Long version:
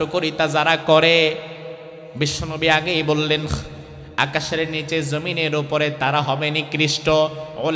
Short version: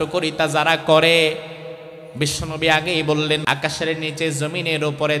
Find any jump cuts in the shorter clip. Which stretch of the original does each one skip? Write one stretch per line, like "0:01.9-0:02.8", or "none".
0:03.4-0:04.1